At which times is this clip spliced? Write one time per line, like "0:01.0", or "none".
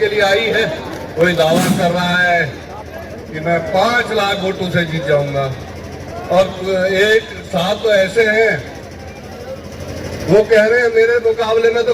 0:01.1